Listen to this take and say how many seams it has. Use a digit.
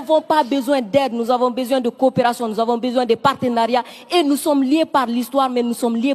0